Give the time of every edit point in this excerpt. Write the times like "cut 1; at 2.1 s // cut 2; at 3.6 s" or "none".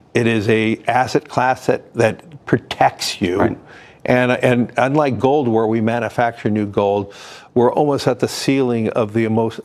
none